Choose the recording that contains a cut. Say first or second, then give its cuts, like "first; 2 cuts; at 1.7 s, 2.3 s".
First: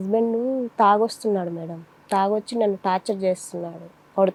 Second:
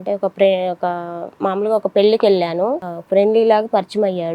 second; 1 cut; at 2.9 s